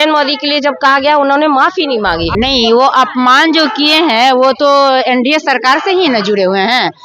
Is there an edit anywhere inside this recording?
yes; 1 cut; at 2.3 s

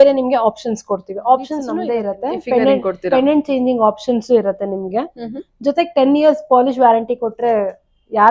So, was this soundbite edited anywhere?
yes; 1 cut; at 1.7 s

